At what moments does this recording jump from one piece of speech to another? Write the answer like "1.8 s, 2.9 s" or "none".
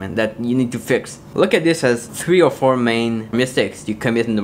1.2 s, 2.1 s, 3.3 s